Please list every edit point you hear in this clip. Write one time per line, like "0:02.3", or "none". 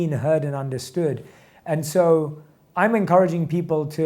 none